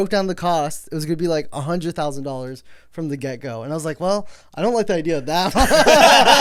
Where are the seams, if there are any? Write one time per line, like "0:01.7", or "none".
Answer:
none